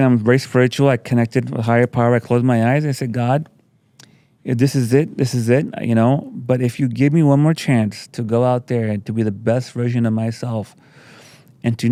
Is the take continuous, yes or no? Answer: yes